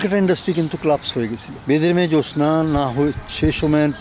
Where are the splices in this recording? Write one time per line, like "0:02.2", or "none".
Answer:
0:01.5